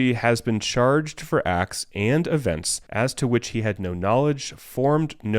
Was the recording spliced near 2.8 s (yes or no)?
yes